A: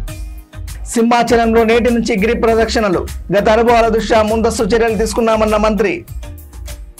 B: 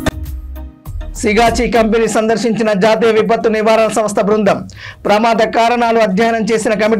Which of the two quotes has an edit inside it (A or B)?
B